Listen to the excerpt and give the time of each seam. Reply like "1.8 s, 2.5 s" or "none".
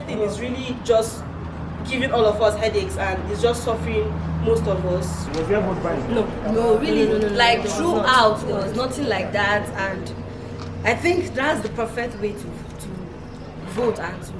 5.3 s